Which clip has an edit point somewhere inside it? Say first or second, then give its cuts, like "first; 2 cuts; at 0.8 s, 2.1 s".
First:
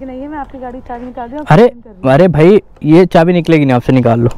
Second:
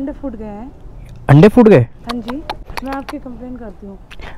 second; 1 cut; at 2.6 s